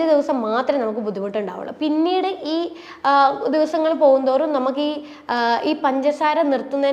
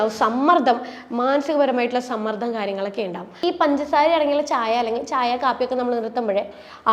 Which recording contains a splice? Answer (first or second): second